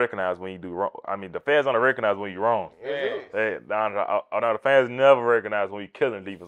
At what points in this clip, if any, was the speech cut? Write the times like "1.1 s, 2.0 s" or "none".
none